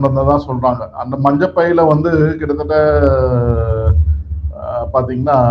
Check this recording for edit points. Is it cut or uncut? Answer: uncut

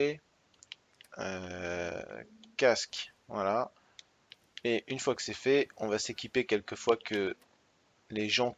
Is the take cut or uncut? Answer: uncut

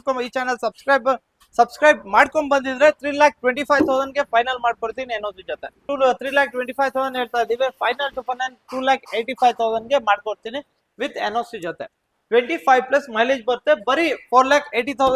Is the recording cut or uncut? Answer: cut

